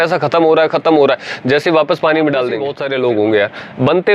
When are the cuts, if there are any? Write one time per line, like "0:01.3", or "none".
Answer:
0:02.8

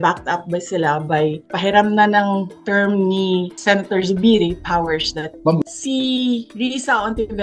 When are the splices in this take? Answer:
0:05.6

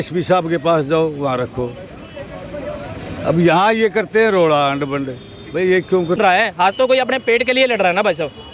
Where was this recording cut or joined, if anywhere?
0:06.2

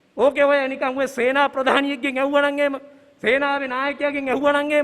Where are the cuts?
none

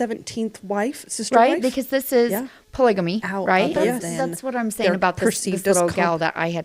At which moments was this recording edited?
0:04.1

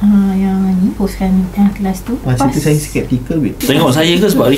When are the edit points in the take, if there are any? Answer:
0:01.0
0:02.3
0:03.6

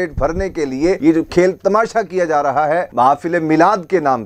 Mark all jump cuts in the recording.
0:01.0
0:02.9

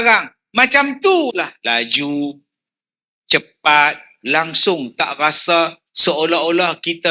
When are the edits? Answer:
0:01.6
0:04.1

